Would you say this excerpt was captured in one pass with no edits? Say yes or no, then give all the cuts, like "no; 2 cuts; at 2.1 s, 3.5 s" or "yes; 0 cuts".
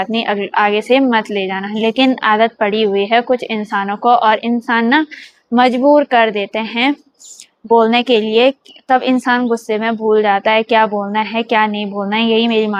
yes; 0 cuts